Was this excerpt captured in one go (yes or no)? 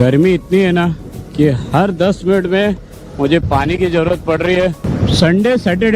no